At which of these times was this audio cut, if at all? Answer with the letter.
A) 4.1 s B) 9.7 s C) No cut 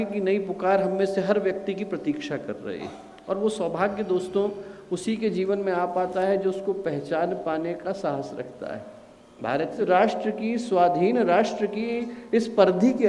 B